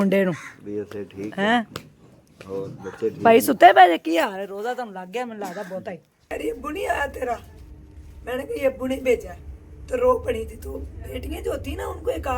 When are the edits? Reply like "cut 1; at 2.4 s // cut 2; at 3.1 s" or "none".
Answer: cut 1; at 6.1 s